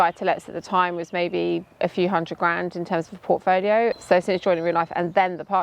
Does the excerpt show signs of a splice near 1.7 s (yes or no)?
no